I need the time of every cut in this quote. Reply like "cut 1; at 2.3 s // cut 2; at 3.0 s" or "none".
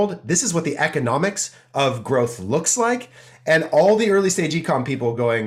none

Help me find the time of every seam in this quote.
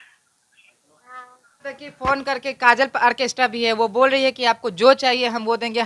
cut 1; at 1.6 s

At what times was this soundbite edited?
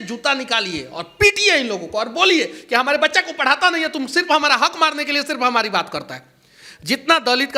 none

